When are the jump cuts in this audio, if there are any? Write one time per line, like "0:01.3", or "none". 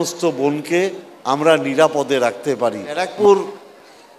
0:03.1